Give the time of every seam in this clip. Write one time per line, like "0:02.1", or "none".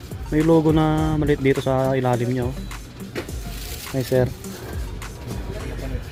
none